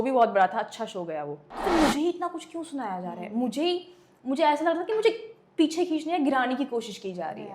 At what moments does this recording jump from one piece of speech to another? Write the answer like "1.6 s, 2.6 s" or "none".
1.4 s